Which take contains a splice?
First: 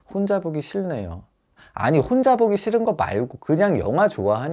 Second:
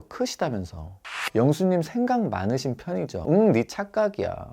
second; 2 cuts; at 1.1 s, 3.2 s

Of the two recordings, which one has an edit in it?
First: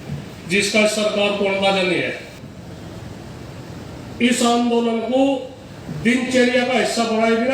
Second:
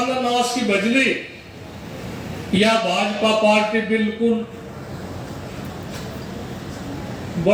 first; 1 cut; at 2.4 s

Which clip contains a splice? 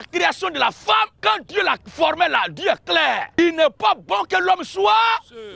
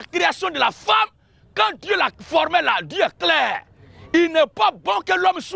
first; 2 cuts; at 1.1 s, 3.3 s

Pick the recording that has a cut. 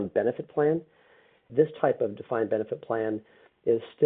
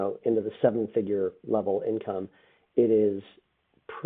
first; 1 cut; at 1.5 s

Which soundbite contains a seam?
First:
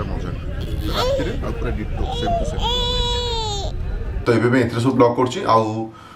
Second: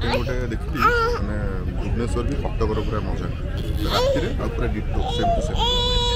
first; 1 cut; at 4.1 s

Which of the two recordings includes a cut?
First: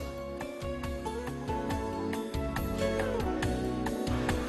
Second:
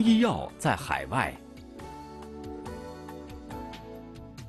second; 1 cut; at 1.4 s

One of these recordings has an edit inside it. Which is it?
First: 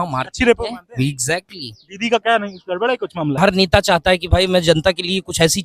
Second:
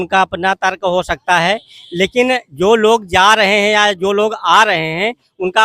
first; 1 cut; at 3.4 s

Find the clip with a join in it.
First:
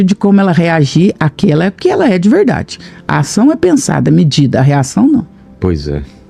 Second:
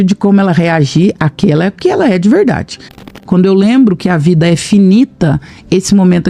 second; 1 cut; at 3.2 s

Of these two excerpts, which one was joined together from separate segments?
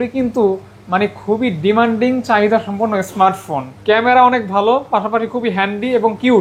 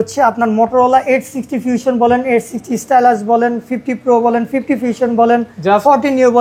first; 1 cut; at 3.7 s

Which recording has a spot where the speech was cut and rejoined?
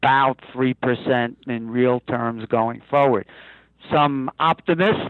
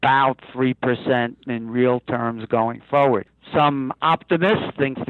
second; 1 cut; at 3.4 s

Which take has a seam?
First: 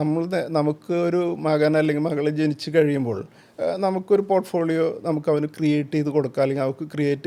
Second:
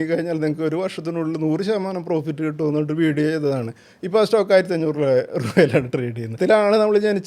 second; 1 cut; at 6.4 s

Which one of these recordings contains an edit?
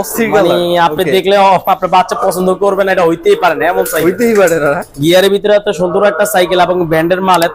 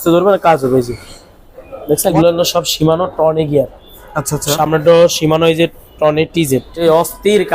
second; 2 cuts; at 2.1 s, 6.7 s

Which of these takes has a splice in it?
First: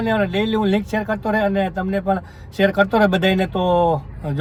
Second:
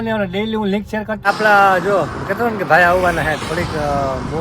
second; 1 cut; at 1.2 s

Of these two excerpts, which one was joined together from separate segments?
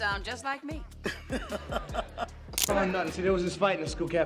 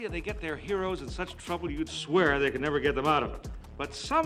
first; 1 cut; at 2.7 s

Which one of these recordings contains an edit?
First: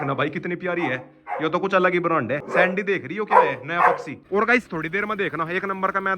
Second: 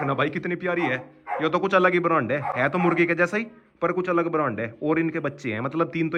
first; 2 cuts; at 2.4 s, 4.1 s

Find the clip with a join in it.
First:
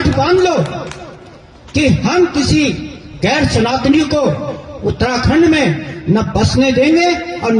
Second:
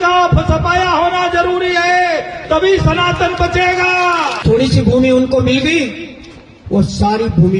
second; 1 cut; at 4.3 s

